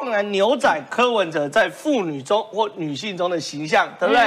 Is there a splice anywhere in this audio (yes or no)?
no